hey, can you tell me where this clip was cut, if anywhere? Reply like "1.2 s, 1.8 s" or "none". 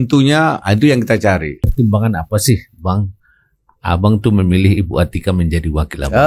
1.6 s